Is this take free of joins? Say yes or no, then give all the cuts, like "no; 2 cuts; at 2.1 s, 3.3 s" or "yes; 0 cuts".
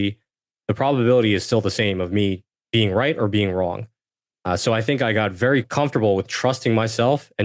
no; 2 cuts; at 2.5 s, 5.7 s